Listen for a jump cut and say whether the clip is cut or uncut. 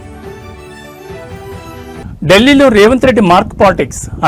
cut